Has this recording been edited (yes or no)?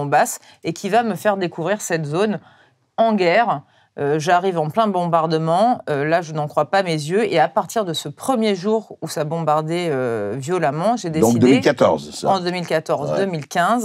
no